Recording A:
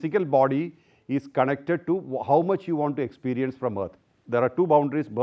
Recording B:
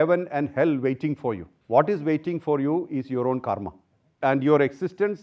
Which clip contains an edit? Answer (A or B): B